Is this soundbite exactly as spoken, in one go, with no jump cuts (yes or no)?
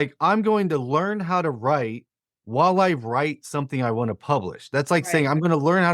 yes